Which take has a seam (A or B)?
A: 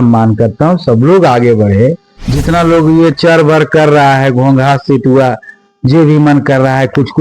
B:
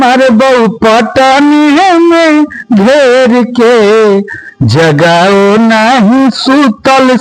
A